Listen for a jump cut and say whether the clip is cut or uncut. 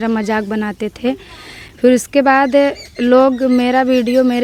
uncut